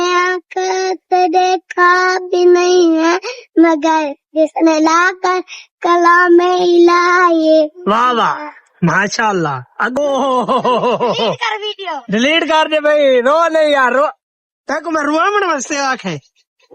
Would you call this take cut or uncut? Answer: cut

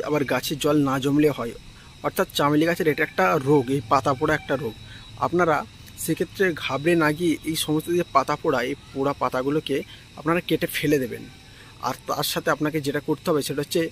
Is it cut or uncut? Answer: uncut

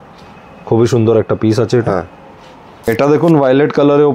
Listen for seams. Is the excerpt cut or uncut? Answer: cut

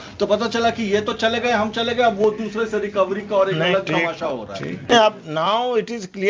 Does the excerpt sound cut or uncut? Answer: cut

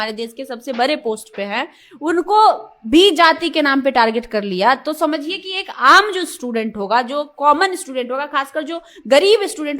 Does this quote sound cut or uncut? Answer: uncut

